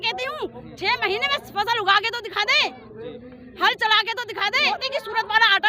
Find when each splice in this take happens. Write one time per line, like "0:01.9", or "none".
0:04.7

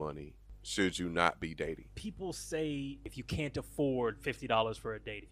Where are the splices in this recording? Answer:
0:01.9
0:03.2

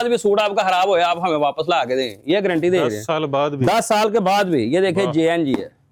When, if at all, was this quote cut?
none

